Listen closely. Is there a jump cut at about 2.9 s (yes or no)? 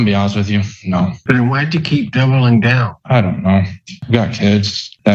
yes